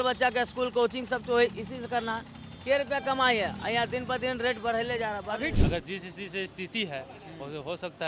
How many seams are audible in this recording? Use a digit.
1